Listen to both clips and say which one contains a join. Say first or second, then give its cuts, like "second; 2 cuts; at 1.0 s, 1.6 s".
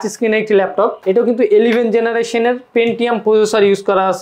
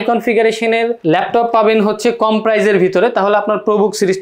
first; 1 cut; at 1.0 s